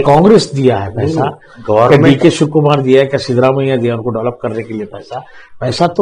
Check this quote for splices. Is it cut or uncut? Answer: uncut